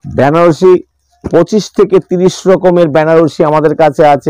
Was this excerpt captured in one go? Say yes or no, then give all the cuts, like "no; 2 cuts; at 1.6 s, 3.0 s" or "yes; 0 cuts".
yes; 0 cuts